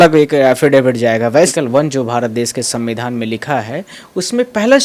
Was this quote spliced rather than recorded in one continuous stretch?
yes; 1 cut; at 1.5 s

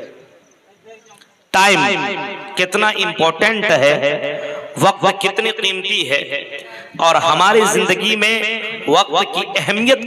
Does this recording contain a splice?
no; 0 cuts

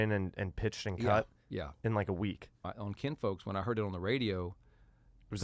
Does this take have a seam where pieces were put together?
yes; 1 cut; at 2.7 s

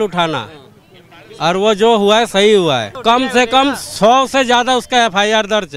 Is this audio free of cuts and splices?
no; 1 cut; at 2.9 s

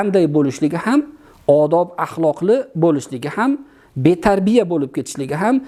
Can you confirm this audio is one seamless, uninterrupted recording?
yes; 0 cuts

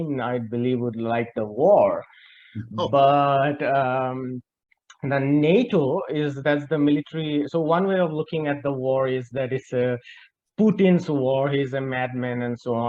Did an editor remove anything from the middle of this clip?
no; 0 cuts

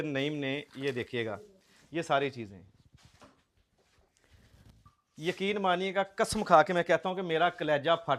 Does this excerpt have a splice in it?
no; 0 cuts

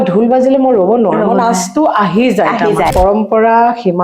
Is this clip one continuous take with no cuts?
no; 1 cut; at 2.9 s

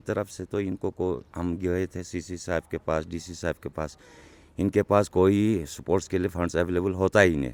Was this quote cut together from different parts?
no; 0 cuts

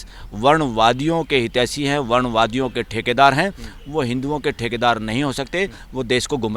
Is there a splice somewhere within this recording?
no; 0 cuts

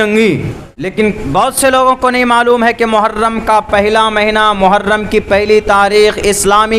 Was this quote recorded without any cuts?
no; 1 cut; at 0.9 s

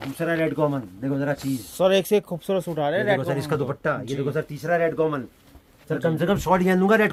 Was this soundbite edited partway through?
no; 0 cuts

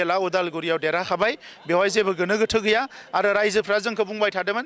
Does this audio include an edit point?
no; 0 cuts

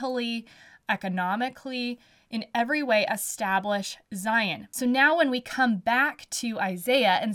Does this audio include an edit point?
yes; 1 cut; at 4.6 s

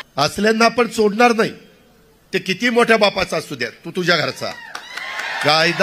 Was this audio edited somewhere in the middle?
no; 0 cuts

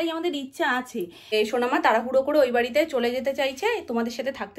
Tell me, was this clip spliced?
yes; 1 cut; at 1.3 s

